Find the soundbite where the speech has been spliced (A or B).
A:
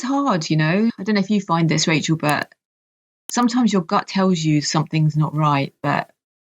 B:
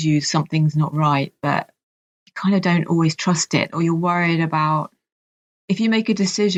A